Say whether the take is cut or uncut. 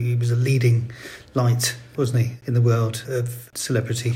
cut